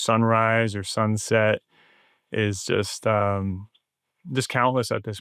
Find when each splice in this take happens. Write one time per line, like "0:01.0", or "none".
none